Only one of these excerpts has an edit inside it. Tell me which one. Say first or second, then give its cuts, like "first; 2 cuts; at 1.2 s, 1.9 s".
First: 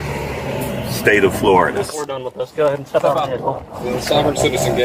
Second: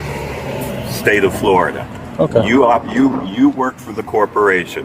first; 2 cuts; at 2.0 s, 3.7 s